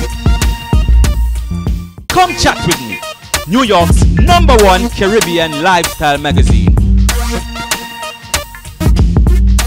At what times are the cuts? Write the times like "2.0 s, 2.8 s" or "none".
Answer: 1.8 s